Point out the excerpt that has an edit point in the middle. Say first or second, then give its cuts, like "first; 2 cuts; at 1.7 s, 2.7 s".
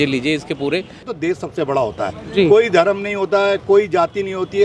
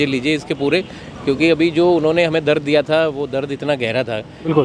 first; 1 cut; at 1.1 s